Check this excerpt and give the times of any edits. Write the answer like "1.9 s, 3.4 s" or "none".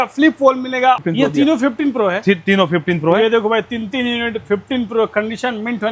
1.0 s